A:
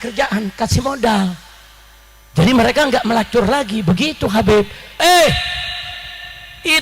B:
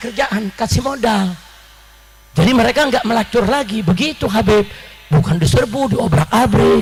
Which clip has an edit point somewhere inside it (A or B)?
A